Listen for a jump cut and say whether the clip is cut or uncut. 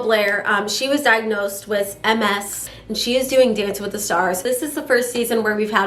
cut